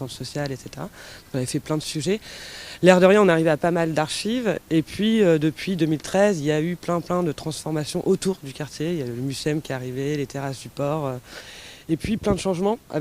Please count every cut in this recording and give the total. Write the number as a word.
one